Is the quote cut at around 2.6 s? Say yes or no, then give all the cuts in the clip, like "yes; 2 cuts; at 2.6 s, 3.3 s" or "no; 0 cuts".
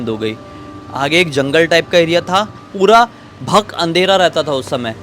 yes; 1 cut; at 2.6 s